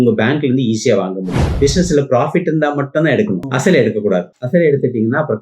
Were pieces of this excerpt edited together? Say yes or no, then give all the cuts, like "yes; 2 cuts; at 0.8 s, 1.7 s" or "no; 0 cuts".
yes; 2 cuts; at 1.4 s, 3.5 s